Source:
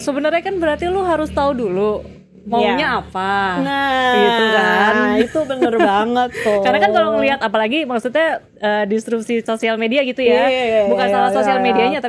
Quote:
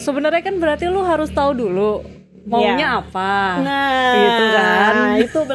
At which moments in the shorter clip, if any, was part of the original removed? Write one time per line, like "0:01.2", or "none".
none